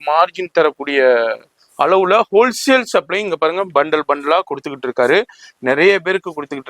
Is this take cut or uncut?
uncut